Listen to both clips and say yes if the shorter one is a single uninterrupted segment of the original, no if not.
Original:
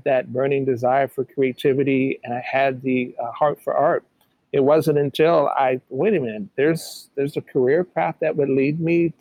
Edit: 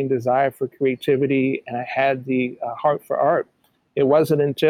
yes